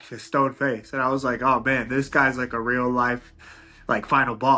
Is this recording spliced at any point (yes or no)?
no